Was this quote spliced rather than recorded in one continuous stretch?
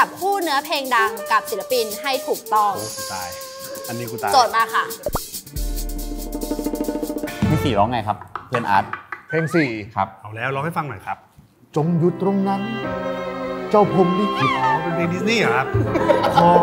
yes; 2 cuts; at 5.4 s, 7.5 s

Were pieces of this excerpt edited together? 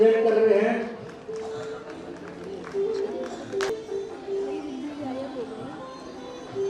yes; 1 cut; at 3.7 s

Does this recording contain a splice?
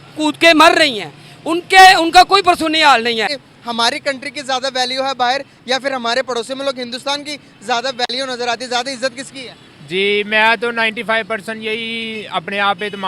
yes; 1 cut; at 3.4 s

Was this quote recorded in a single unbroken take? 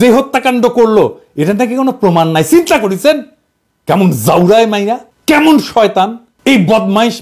no; 2 cuts; at 5.1 s, 6.2 s

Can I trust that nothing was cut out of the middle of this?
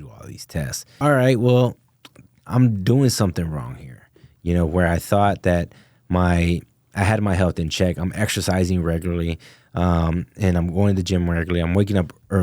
no; 1 cut; at 0.9 s

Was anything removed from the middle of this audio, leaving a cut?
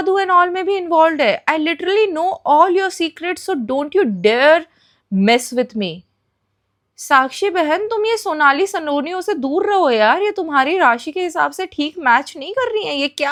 no; 0 cuts

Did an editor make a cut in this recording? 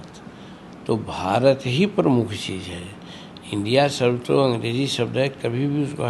no; 0 cuts

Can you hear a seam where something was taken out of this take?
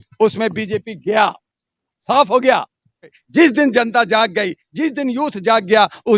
yes; 1 cut; at 3.1 s

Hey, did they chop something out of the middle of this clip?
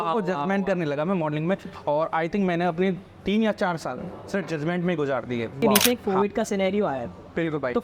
yes; 1 cut; at 5.6 s

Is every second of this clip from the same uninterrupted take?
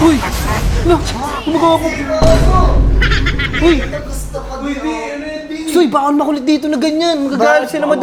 yes; 0 cuts

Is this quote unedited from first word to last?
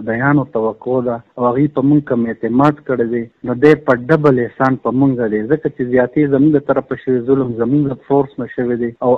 yes; 0 cuts

